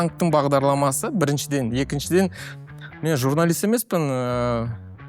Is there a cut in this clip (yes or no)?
no